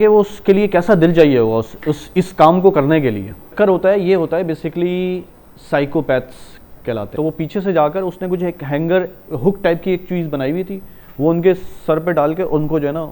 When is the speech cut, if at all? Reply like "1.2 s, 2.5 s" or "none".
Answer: 3.5 s, 7.1 s